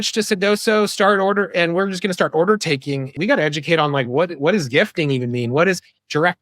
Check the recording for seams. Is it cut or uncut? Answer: cut